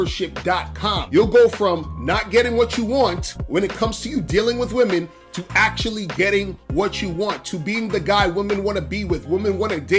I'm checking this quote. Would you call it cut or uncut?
cut